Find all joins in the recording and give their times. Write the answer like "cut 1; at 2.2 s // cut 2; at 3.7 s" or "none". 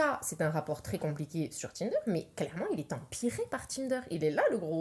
none